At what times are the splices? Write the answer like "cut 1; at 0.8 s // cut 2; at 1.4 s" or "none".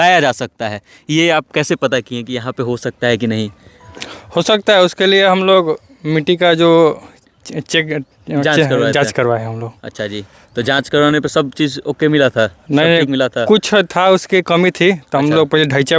none